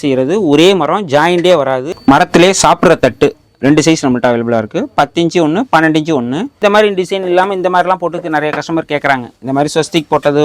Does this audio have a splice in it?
yes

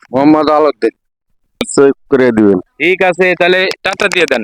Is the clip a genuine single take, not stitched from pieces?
no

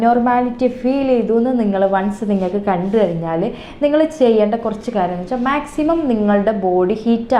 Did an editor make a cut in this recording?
no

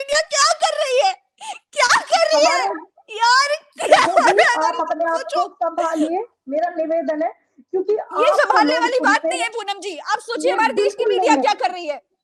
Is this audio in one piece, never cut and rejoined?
yes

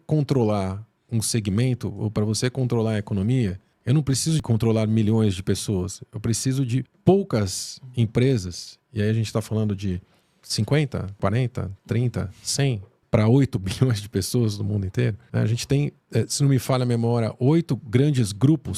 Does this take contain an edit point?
no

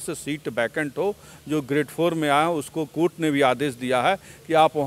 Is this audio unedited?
yes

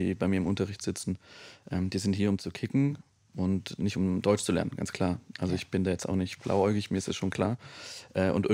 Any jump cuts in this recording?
no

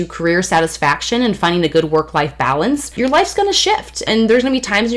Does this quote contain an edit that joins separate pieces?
yes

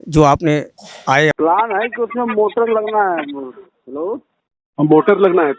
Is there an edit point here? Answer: yes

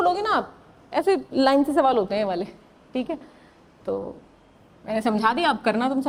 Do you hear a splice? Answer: no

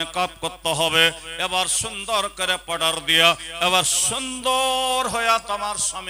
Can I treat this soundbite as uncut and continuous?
yes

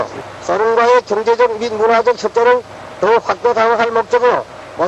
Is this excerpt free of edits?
no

